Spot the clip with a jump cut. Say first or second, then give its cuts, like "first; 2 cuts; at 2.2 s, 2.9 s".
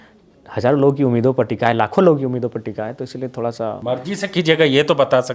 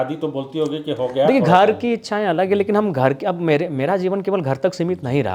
first; 1 cut; at 3.8 s